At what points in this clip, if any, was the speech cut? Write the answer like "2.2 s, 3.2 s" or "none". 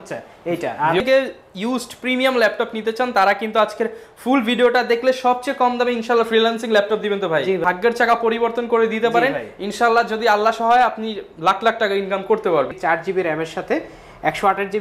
1.0 s, 7.6 s, 12.8 s